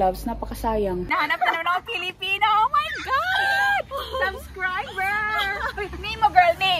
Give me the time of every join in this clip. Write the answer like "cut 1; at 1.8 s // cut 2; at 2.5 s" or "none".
cut 1; at 1.1 s